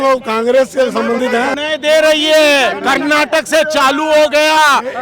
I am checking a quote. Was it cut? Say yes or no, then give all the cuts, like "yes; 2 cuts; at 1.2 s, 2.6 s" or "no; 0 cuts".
yes; 1 cut; at 1.6 s